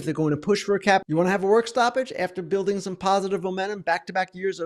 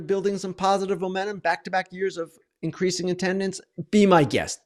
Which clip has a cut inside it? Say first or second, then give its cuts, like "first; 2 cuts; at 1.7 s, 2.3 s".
first; 1 cut; at 1.1 s